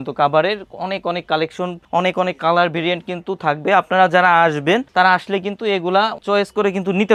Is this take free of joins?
yes; 0 cuts

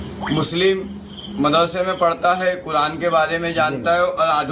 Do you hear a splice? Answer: no; 0 cuts

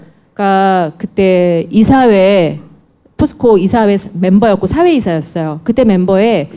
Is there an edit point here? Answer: yes; 1 cut; at 2.4 s

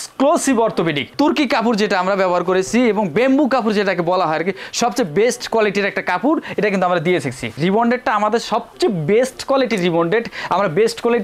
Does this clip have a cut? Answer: yes; 2 cuts; at 1.1 s, 7.5 s

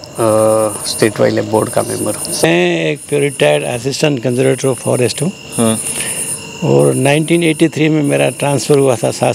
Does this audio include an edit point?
yes; 1 cut; at 2.4 s

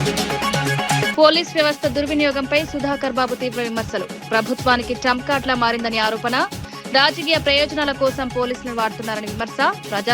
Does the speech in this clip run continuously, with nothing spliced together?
yes; 0 cuts

